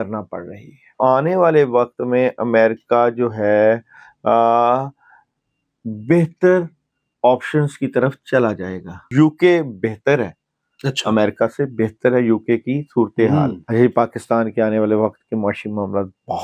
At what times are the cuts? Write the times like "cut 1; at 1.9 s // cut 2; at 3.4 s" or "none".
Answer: cut 1; at 0.9 s // cut 2; at 9.1 s // cut 3; at 13.6 s